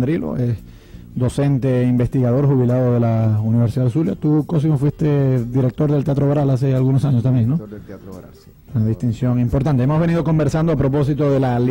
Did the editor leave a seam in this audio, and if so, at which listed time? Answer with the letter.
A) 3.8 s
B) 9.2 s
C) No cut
B